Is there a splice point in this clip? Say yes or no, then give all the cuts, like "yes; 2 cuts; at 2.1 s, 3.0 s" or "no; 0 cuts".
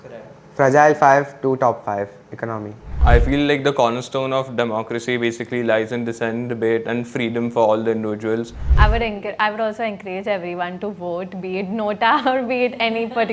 yes; 2 cuts; at 2.9 s, 8.7 s